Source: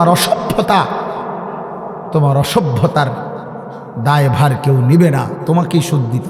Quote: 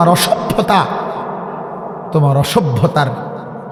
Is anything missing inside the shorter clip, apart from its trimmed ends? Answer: no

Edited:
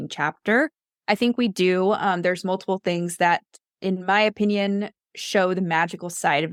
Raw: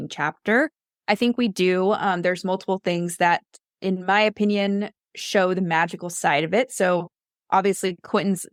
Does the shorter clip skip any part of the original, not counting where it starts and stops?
no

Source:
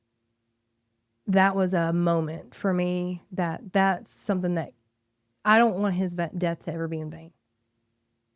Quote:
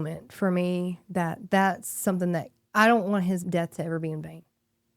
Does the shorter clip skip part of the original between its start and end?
yes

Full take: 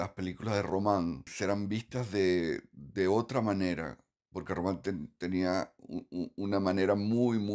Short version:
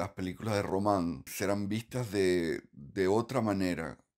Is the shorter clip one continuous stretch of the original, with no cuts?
yes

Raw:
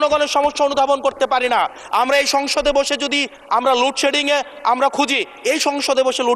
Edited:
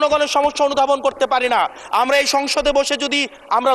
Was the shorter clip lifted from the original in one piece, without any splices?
yes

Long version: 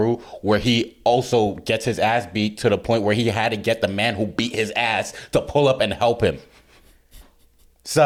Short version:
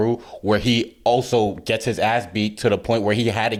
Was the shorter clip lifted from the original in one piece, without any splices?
yes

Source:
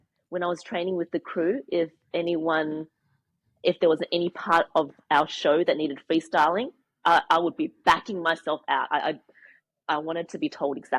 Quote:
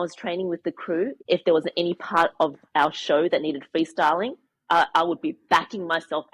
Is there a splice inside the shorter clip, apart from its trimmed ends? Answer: yes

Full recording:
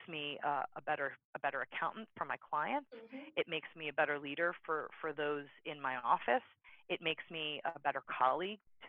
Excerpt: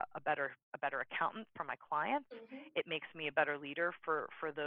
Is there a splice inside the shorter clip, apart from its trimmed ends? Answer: no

